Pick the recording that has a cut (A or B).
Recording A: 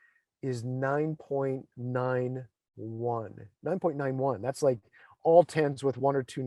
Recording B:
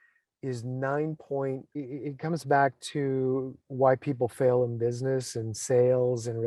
B